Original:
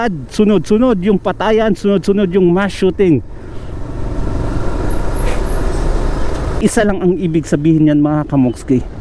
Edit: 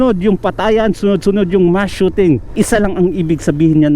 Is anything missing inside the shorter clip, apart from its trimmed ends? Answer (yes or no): yes